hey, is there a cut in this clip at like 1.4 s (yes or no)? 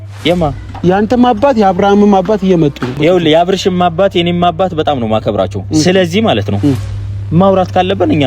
no